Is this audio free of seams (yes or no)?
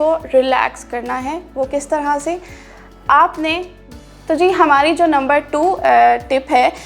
no